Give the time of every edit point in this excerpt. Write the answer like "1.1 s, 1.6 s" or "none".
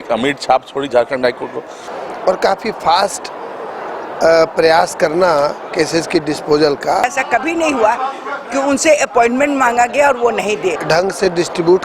1.8 s, 7.1 s, 10.8 s